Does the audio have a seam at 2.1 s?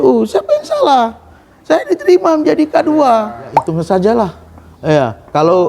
no; 1 cut; at 3.7 s

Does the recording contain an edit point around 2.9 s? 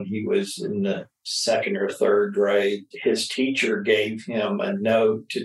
yes; 1 cut; at 2.9 s

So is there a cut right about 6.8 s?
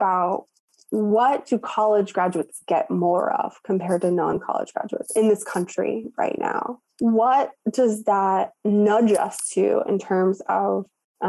yes; 1 cut; at 6.8 s

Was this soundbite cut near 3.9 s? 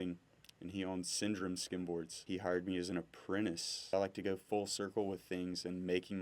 yes; 2 cuts; at 2.2 s, 3.9 s

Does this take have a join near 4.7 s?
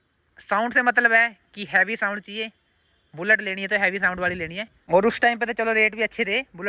yes; 1 cut; at 4.7 s

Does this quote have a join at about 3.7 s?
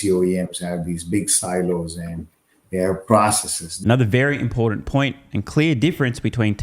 no; 0 cuts

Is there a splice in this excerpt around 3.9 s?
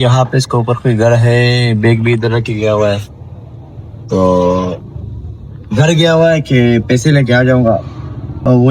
no; 0 cuts

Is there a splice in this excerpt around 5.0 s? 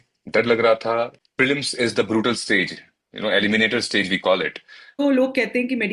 yes; 2 cuts; at 1.2 s, 5.0 s

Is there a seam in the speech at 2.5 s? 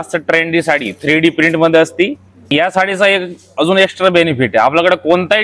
yes; 1 cut; at 2.5 s

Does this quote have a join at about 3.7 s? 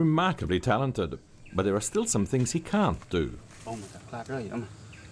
no; 0 cuts

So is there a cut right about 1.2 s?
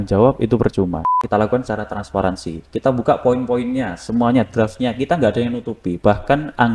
yes; 1 cut; at 1.2 s

